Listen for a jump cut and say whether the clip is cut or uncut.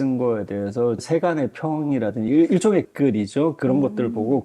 cut